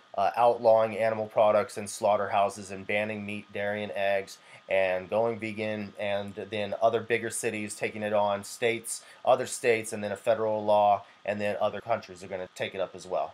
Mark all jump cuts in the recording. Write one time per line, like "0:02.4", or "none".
none